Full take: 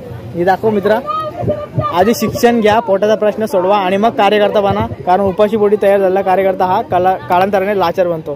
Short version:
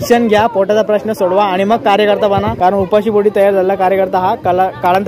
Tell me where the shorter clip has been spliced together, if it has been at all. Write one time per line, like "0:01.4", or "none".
0:02.5

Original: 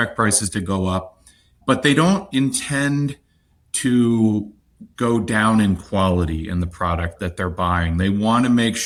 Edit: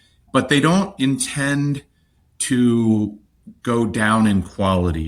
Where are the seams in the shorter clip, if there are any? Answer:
none

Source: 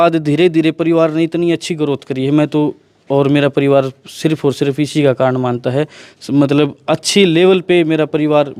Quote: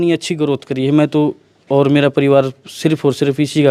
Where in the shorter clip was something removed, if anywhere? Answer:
none

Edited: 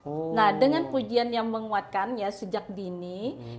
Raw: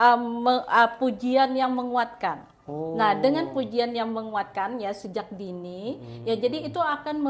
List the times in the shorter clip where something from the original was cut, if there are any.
none

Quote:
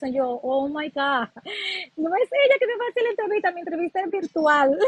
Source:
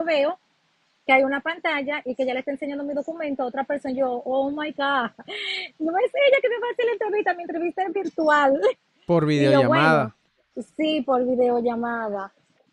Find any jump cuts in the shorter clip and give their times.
none

